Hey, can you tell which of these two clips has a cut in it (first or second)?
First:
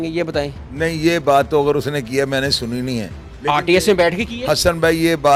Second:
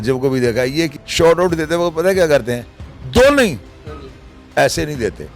second